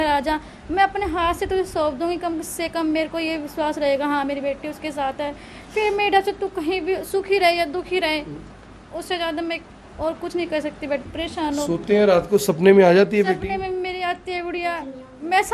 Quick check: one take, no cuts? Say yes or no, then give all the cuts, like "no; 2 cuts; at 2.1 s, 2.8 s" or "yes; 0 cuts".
no; 1 cut; at 11.0 s